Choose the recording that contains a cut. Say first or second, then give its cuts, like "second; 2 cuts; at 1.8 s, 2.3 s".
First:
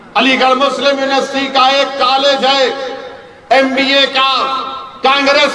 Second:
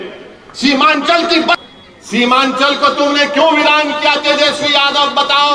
second; 1 cut; at 1.6 s